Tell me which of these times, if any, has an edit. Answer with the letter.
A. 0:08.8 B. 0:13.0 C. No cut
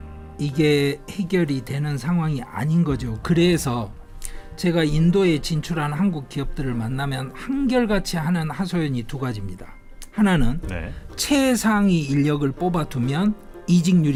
C